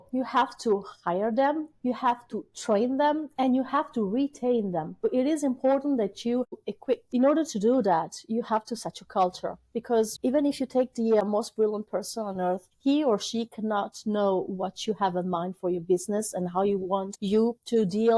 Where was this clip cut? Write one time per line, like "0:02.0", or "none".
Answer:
0:05.0
0:06.5
0:10.1
0:11.2
0:12.7
0:17.1